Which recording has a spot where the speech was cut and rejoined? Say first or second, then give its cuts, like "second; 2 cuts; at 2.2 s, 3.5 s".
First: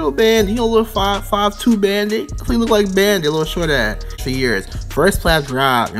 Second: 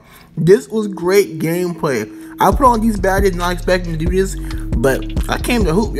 first; 1 cut; at 4.2 s